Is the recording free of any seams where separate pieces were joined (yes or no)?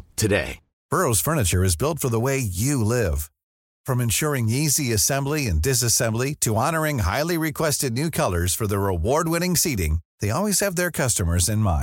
yes